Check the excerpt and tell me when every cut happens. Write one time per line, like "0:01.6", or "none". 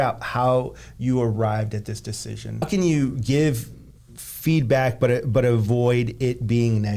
0:02.7